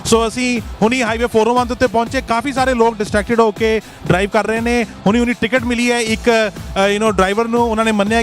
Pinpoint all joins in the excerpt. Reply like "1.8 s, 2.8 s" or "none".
4.9 s